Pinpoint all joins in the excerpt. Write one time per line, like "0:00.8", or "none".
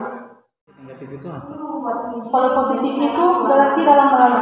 0:01.1